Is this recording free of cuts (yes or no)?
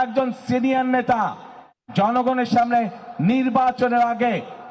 yes